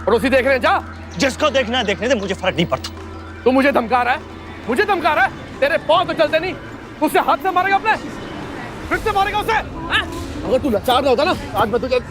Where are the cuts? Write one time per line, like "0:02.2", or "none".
0:01.0
0:03.3